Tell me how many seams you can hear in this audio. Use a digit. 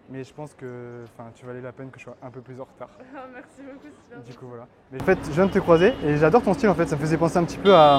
1